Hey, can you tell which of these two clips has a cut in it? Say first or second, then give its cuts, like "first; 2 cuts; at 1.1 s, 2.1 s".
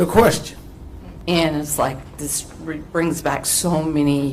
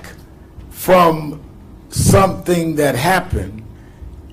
first; 1 cut; at 1.1 s